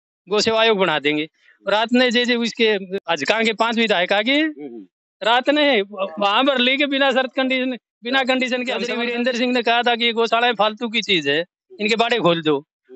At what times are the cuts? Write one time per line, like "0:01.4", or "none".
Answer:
0:02.9
0:08.9